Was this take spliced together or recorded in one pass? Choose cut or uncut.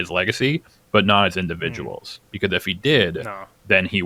uncut